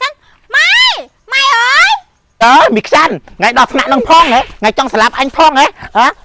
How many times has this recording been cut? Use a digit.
1